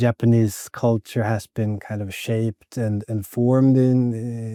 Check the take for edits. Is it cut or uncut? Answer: uncut